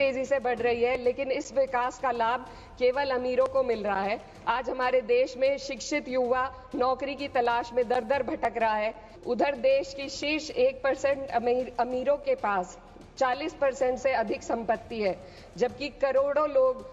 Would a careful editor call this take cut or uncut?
cut